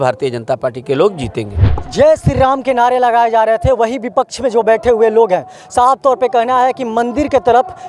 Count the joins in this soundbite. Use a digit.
1